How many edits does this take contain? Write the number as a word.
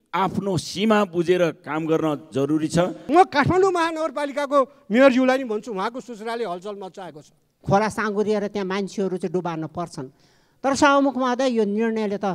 two